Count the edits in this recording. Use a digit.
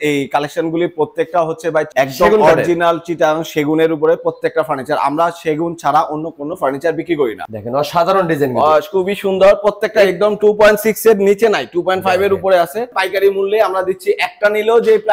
3